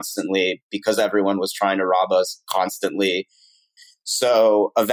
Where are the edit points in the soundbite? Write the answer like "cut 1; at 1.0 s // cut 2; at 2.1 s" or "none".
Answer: cut 1; at 3.7 s